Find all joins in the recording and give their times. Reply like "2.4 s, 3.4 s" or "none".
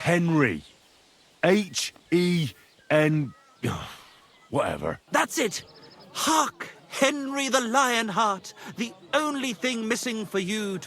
5.0 s